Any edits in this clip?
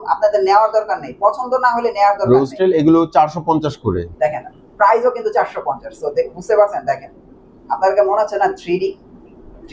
no; 0 cuts

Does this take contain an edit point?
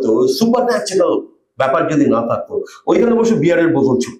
no; 0 cuts

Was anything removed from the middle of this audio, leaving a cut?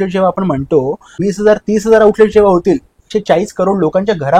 yes; 2 cuts; at 1.2 s, 3.1 s

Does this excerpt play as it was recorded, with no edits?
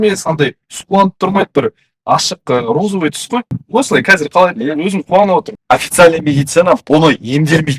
no; 2 cuts; at 3.6 s, 5.5 s

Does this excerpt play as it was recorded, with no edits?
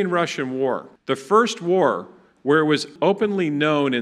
no; 2 cuts; at 0.9 s, 2.9 s

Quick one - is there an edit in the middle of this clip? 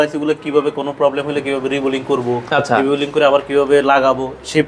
no; 0 cuts

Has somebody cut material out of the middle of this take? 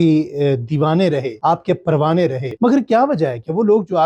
yes; 1 cut; at 2.4 s

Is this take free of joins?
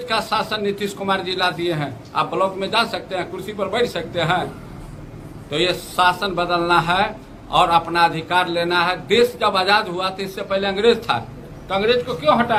yes; 0 cuts

